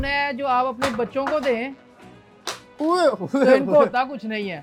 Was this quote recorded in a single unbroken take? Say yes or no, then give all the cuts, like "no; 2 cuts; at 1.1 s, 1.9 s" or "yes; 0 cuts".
yes; 0 cuts